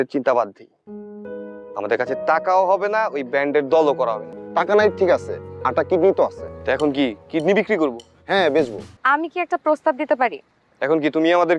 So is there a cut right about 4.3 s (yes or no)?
yes